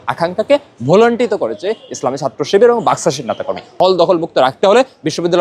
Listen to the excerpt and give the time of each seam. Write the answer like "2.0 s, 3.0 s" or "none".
3.7 s